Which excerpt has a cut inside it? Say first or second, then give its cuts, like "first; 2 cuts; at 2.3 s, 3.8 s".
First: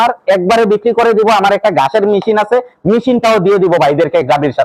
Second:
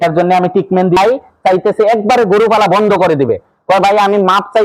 second; 1 cut; at 1.0 s